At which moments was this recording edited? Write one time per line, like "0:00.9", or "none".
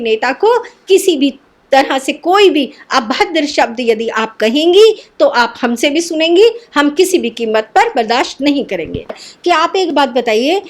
0:09.1